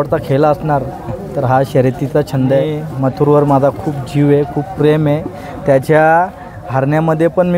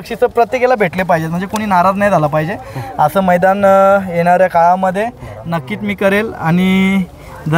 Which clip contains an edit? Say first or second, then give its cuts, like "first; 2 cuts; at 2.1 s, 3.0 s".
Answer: first; 1 cut; at 2.8 s